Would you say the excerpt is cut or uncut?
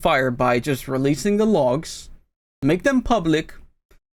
uncut